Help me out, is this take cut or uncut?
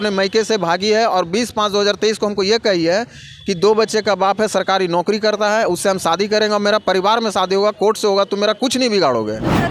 uncut